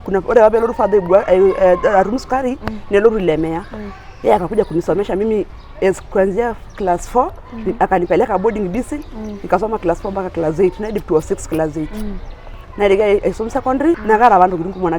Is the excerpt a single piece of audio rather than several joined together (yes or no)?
no